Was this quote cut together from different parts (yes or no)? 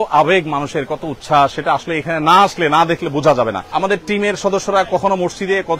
yes